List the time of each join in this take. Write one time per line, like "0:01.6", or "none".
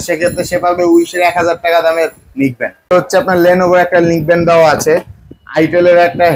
0:02.9